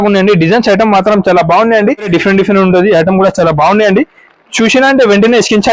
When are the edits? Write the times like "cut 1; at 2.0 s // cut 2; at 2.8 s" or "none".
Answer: cut 1; at 2.1 s